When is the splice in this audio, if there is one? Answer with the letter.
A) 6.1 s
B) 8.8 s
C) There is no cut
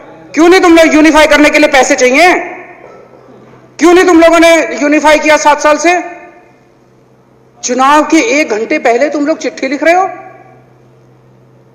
C